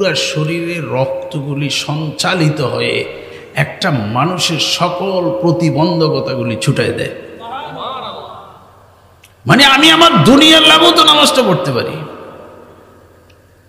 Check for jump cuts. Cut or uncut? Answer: uncut